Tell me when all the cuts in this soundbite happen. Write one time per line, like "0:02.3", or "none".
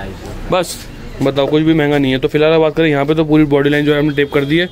none